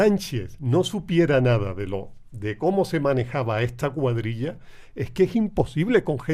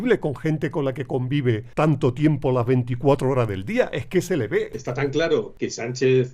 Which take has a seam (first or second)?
second